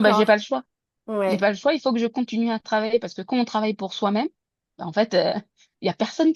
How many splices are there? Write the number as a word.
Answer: zero